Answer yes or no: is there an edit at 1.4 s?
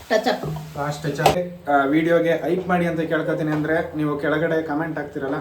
yes